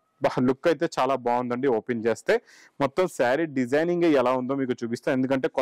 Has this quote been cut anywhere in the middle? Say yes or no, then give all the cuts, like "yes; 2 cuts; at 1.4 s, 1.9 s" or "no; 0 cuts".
no; 0 cuts